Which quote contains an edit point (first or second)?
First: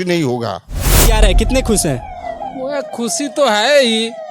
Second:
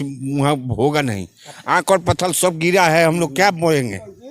first